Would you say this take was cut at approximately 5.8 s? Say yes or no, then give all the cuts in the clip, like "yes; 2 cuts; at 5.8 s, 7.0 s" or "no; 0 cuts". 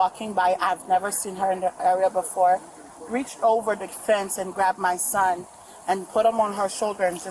no; 0 cuts